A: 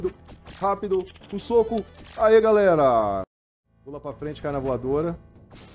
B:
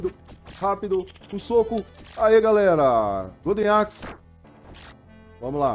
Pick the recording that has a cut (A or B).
A